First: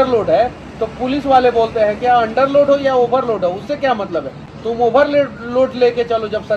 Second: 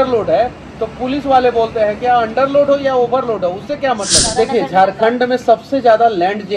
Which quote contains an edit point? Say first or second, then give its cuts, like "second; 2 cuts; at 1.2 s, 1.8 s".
second; 1 cut; at 4.2 s